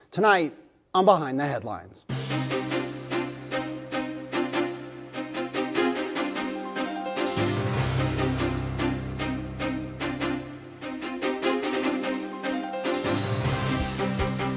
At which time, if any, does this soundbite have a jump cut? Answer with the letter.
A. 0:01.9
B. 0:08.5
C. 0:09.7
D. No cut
D